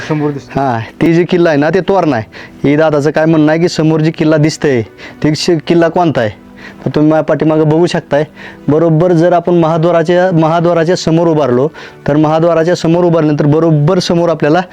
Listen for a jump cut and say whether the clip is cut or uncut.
cut